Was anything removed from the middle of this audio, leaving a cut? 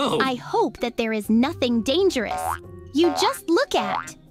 no; 0 cuts

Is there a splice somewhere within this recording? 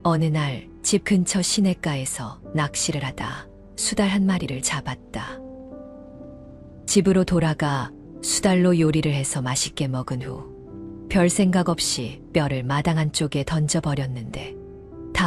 no; 0 cuts

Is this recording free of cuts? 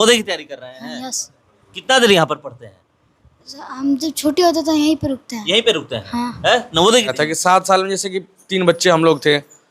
no; 1 cut; at 7.1 s

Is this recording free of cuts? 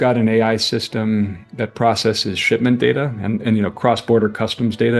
yes; 0 cuts

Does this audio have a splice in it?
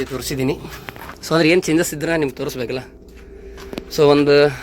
no; 0 cuts

